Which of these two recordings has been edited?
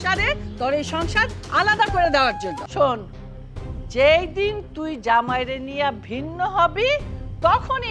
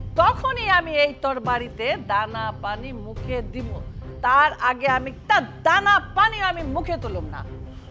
first; 1 cut; at 2.6 s

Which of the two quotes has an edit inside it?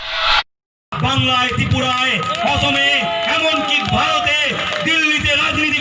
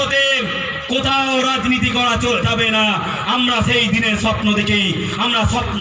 first; 1 cut; at 0.9 s

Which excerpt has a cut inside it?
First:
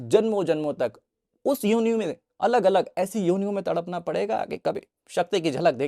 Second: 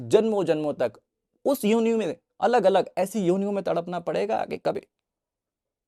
first; 1 cut; at 4.9 s

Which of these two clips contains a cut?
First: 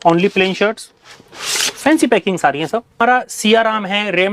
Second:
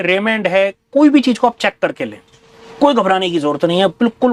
first; 1 cut; at 3.0 s

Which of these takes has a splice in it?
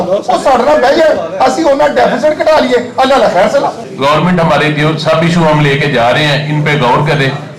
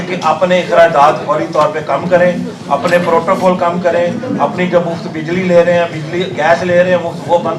first; 1 cut; at 3.9 s

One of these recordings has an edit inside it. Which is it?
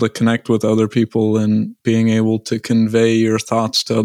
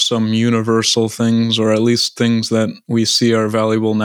first; 1 cut; at 1.7 s

